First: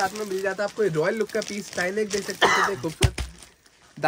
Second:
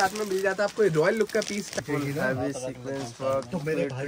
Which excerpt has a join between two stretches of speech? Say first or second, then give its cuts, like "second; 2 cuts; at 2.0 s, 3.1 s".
second; 1 cut; at 1.8 s